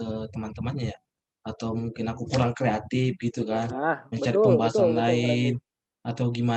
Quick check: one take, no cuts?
yes; 0 cuts

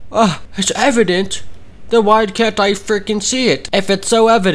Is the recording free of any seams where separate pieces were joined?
yes; 0 cuts

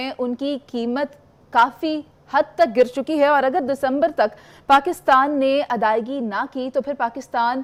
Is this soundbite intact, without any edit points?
yes; 0 cuts

